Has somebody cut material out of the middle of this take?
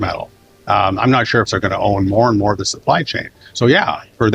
yes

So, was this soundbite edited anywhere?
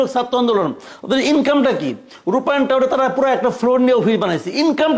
no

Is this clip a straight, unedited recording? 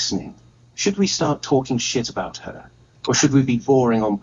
yes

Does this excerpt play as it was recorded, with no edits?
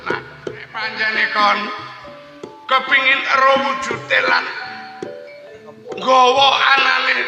no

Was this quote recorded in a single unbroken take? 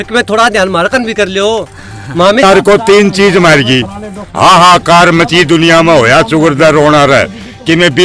no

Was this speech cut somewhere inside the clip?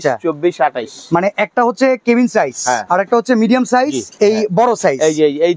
yes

